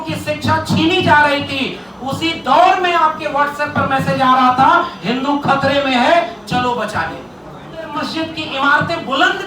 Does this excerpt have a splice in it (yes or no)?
yes